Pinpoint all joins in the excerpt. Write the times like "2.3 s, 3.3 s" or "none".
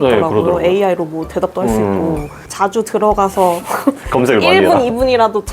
2.3 s